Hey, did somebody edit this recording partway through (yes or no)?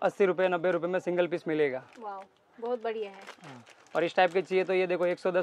no